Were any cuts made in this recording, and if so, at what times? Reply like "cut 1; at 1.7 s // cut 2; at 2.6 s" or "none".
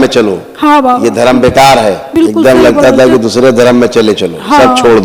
cut 1; at 2.1 s